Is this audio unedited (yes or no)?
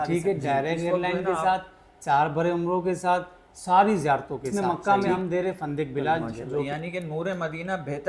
no